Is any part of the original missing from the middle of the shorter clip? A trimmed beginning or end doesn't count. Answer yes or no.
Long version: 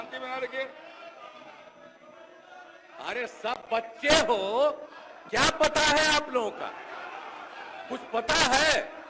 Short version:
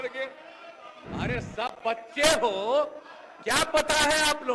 yes